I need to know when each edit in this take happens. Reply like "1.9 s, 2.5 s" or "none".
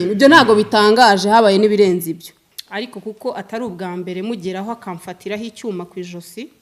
2.3 s